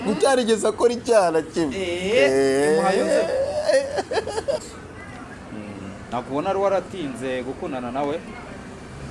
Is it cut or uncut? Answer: cut